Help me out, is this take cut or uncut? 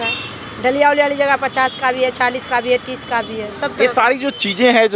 uncut